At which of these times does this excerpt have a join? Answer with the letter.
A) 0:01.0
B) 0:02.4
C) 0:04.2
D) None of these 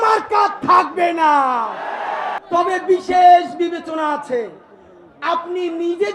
B